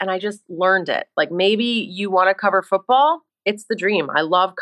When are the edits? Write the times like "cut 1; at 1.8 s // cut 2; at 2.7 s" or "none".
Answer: cut 1; at 1.1 s